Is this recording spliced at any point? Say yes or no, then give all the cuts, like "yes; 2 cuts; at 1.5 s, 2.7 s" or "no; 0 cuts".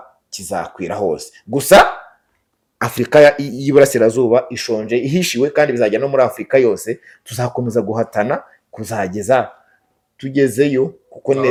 no; 0 cuts